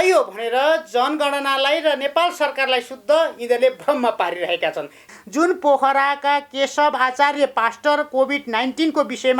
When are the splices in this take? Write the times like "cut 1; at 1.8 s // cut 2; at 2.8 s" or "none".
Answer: cut 1; at 5.1 s

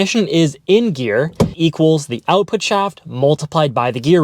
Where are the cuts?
cut 1; at 1.5 s

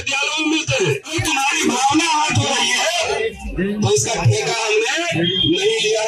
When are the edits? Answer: cut 1; at 1.1 s

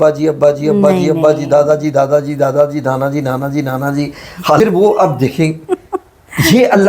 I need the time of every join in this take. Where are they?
cut 1; at 4.6 s

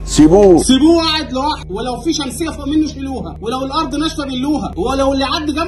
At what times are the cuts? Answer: cut 1; at 1.6 s // cut 2; at 3.3 s // cut 3; at 4.7 s

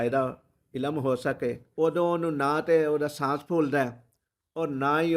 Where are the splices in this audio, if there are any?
cut 1; at 1.6 s

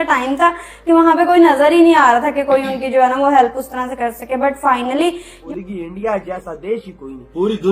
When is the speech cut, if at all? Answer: cut 1; at 5.4 s

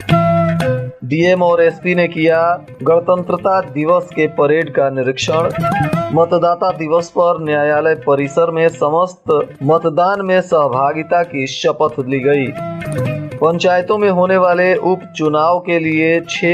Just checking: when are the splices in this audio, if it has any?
cut 1; at 0.9 s

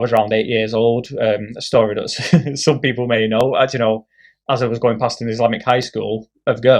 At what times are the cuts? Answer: none

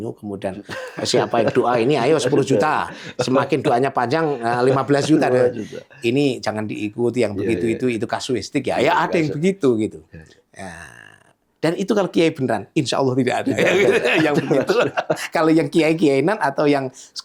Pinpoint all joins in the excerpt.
none

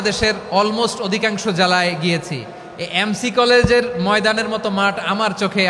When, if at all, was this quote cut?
none

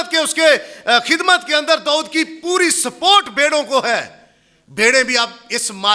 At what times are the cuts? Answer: none

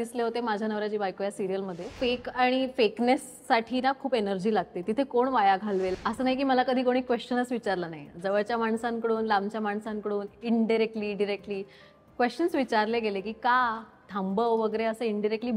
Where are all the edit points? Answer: cut 1; at 2.0 s // cut 2; at 5.9 s

